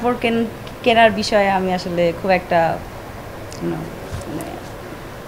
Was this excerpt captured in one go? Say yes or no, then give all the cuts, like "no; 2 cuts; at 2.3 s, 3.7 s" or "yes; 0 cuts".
yes; 0 cuts